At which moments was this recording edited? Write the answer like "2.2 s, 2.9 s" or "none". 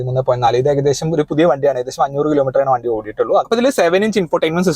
3.5 s